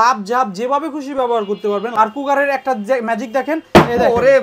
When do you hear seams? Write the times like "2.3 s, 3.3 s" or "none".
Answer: 1.9 s